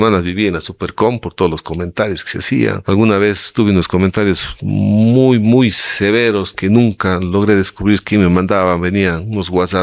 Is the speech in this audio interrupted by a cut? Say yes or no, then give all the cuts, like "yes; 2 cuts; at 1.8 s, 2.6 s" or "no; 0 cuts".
yes; 1 cut; at 2.8 s